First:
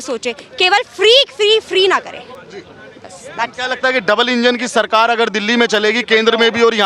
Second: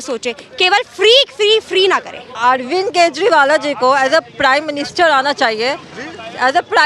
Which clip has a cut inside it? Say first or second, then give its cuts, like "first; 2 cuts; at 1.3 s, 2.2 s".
second; 1 cut; at 2.2 s